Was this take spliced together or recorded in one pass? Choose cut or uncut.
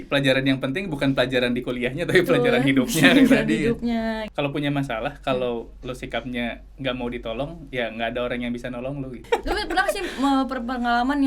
cut